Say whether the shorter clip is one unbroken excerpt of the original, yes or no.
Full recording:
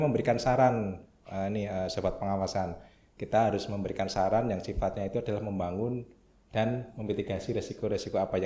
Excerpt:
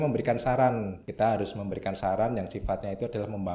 no